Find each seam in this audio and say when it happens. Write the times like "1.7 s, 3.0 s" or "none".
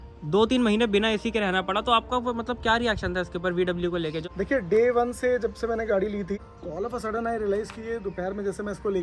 4.2 s, 6.5 s